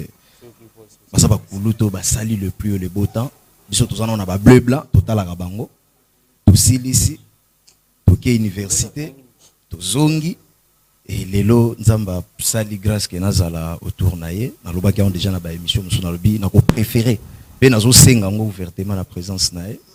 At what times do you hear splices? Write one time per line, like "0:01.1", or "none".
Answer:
none

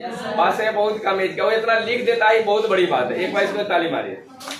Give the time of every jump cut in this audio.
none

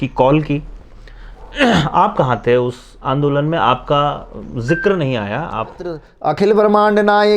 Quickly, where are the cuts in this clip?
0:06.1

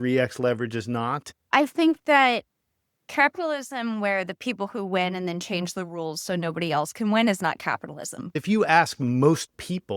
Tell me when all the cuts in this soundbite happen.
0:01.5
0:08.3

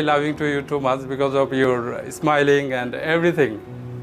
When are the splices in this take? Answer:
none

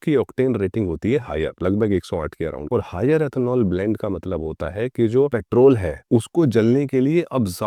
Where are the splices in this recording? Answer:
none

